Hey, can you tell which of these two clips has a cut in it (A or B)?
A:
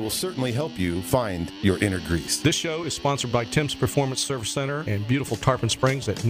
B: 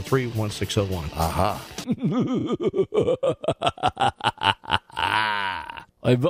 B